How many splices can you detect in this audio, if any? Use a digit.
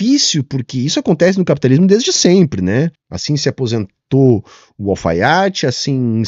1